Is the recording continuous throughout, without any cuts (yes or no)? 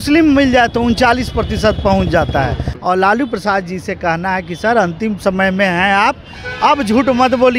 no